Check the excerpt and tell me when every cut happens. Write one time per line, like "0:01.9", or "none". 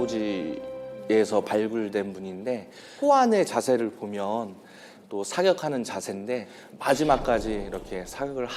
none